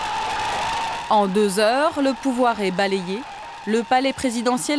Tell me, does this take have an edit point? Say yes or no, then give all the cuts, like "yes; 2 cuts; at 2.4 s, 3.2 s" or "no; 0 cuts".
no; 0 cuts